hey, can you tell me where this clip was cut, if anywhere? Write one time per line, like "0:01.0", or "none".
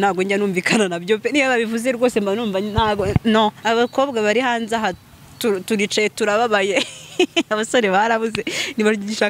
0:03.6